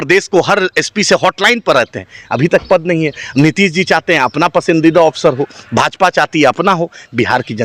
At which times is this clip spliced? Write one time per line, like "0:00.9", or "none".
none